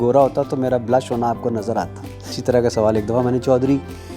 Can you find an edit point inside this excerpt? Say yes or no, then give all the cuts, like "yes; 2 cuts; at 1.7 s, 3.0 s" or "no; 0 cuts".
yes; 1 cut; at 2.4 s